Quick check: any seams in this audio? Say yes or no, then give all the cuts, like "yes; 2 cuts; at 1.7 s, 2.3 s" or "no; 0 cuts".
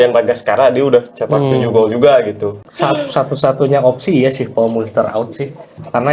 yes; 1 cut; at 2.7 s